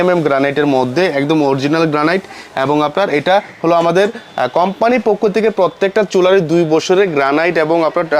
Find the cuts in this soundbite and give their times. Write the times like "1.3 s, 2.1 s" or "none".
none

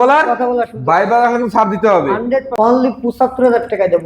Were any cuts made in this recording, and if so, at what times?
2.5 s

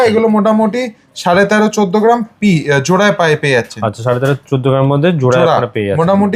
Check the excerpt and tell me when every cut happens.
none

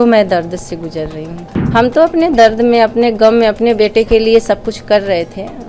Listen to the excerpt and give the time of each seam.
1.5 s

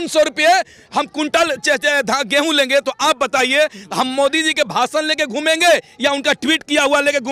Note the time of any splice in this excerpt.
none

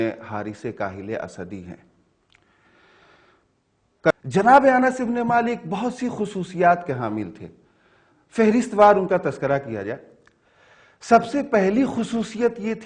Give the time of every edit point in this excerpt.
4.1 s

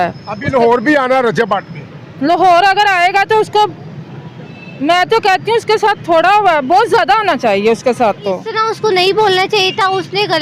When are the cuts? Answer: 8.5 s

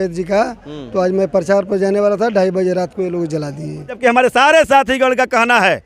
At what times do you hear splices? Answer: 4.0 s

